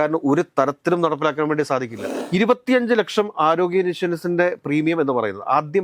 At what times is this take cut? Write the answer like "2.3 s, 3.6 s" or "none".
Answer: 2.0 s